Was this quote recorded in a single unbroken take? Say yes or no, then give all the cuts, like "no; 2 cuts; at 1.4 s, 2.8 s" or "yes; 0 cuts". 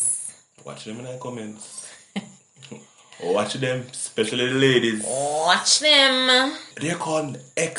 no; 1 cut; at 6.7 s